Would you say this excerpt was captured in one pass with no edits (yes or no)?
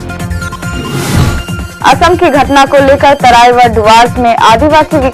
no